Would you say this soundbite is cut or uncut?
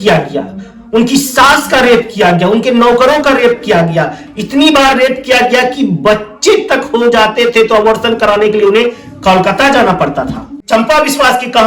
uncut